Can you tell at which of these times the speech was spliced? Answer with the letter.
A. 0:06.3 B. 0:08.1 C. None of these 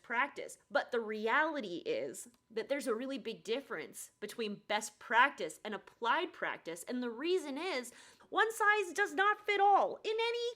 B